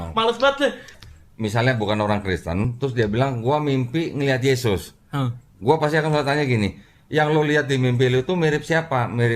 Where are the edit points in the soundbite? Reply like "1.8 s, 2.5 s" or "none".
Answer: 1.0 s, 2.7 s